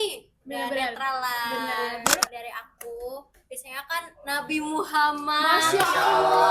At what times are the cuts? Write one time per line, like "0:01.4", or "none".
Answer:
0:02.3